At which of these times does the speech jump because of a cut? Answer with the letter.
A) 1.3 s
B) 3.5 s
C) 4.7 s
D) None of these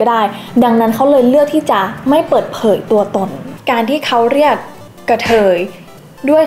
B